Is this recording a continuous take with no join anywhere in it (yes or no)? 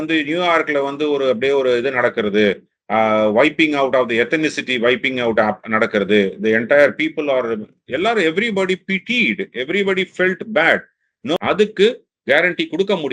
no